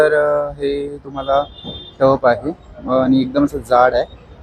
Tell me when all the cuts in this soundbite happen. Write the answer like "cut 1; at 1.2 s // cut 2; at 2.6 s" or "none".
none